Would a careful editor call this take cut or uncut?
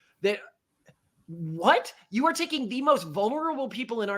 uncut